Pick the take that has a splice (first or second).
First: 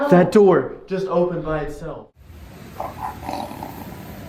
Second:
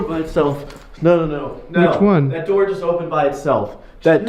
first